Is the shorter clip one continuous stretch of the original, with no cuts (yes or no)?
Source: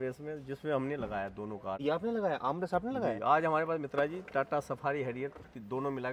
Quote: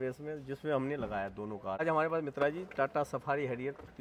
no